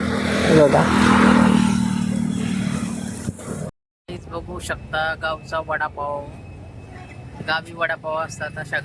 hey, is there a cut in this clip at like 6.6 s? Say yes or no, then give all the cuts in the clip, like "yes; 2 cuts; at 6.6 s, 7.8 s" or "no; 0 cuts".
no; 1 cut; at 3.8 s